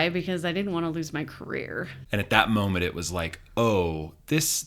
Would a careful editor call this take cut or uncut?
cut